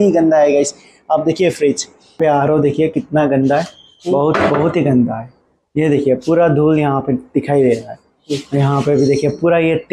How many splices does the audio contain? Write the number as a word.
one